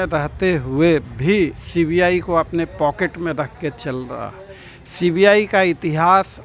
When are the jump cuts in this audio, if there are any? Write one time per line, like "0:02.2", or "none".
none